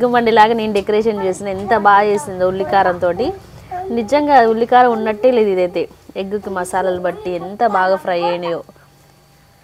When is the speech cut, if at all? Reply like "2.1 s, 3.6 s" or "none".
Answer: none